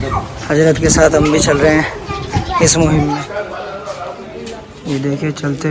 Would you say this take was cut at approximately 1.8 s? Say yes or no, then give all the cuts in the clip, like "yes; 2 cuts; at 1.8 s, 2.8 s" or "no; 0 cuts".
no; 1 cut; at 3.3 s